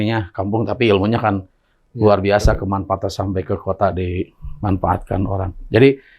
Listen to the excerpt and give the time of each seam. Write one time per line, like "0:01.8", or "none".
none